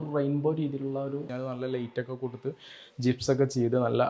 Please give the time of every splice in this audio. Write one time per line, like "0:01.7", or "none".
0:01.4

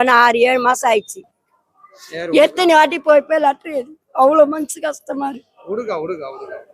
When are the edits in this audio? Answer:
0:01.4

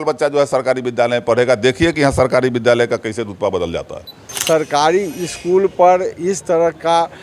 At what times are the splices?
0:04.2

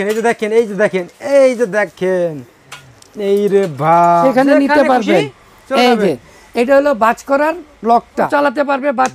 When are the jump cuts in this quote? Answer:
0:04.2
0:08.3

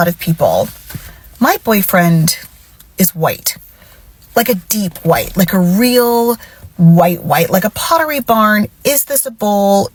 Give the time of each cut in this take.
none

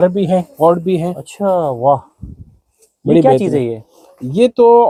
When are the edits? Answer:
none

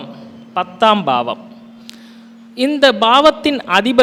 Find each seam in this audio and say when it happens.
none

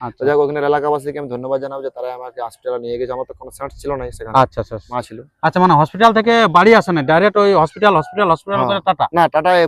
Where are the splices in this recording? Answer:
0:04.8

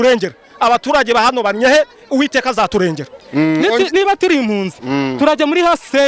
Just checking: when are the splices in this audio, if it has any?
0:03.1

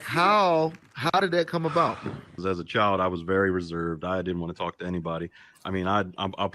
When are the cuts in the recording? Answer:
0:02.4

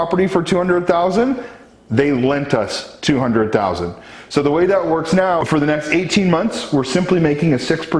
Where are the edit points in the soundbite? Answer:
0:05.4

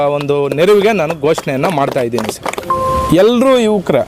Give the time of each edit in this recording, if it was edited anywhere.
0:02.5

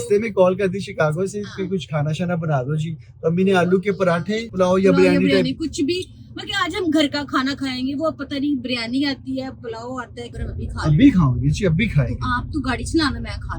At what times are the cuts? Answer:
0:04.5
0:10.3

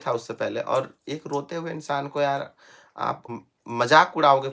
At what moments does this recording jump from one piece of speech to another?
0:03.3

